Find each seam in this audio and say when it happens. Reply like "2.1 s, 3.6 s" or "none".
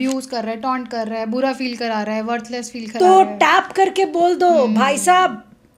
none